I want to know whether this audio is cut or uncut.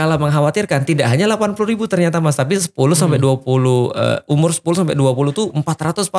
uncut